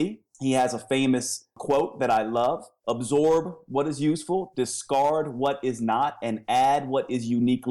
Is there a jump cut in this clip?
yes; 1 cut; at 1.6 s

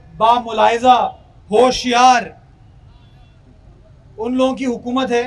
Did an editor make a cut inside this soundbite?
no; 0 cuts

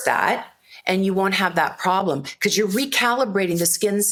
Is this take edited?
no; 0 cuts

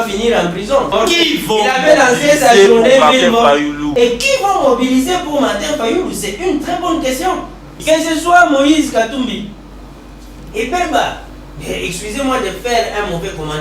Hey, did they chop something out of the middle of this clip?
yes; 3 cuts; at 0.9 s, 3.8 s, 7.7 s

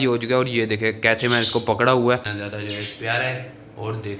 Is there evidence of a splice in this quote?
yes; 1 cut; at 2.3 s

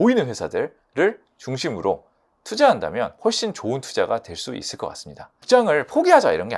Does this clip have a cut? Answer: yes; 2 cuts; at 3.1 s, 5.4 s

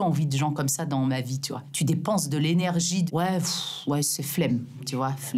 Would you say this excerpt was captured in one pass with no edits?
yes; 0 cuts

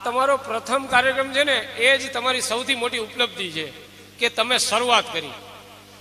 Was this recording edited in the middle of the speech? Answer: no; 0 cuts

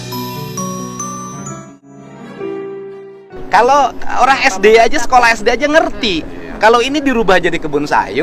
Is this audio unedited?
no; 1 cut; at 1.6 s

